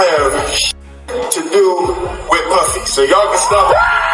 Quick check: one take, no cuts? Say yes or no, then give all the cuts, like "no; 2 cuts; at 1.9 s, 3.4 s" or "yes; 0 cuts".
yes; 0 cuts